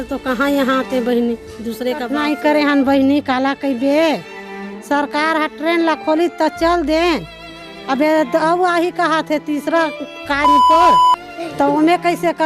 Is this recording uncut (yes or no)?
no